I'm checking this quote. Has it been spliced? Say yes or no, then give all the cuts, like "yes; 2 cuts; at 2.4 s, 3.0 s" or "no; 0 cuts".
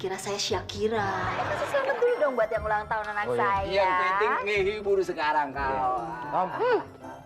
yes; 1 cut; at 1.3 s